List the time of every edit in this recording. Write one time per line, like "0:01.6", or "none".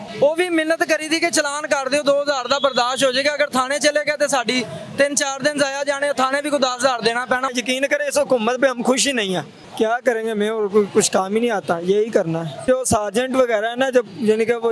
0:07.5
0:09.6
0:12.6